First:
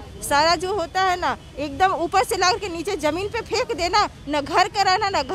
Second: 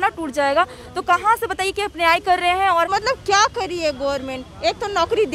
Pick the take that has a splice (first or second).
second